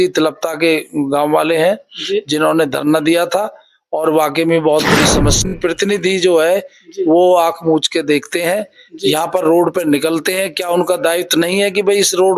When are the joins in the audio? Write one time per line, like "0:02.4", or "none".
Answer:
0:05.5